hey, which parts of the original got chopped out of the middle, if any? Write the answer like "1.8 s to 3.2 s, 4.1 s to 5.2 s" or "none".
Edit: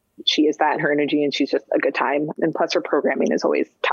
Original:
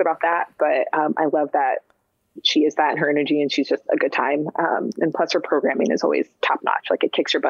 4.5 s to 4.9 s